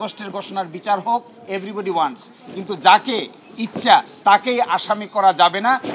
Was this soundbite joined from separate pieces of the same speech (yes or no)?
no